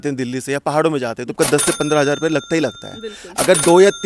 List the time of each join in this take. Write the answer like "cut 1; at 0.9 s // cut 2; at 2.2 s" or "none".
cut 1; at 1.3 s

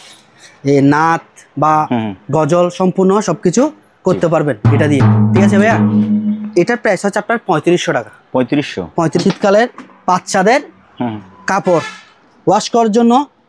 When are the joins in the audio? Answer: cut 1; at 9.2 s

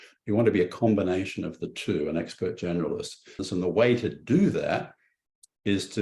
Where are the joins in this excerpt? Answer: cut 1; at 3.3 s

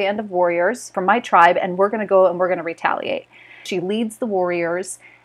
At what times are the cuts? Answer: cut 1; at 0.9 s // cut 2; at 3.6 s

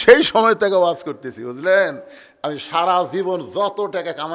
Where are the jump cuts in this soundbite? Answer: none

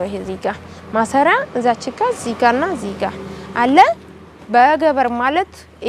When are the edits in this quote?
none

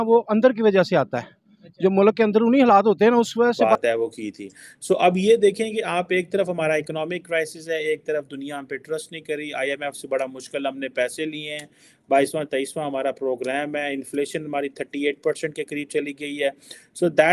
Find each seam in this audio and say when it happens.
cut 1; at 3.6 s

